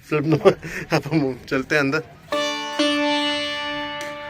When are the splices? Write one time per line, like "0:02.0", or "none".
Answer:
0:02.2